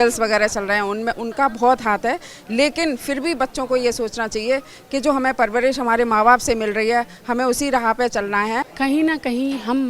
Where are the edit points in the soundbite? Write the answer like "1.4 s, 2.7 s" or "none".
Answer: 8.7 s